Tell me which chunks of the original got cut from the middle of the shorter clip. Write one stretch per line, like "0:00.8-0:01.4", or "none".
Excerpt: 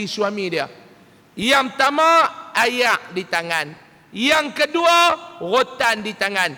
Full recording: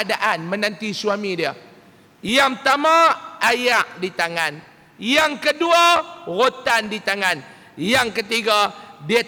none